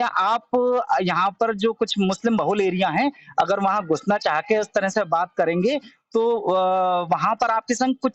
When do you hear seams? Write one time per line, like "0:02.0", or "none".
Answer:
none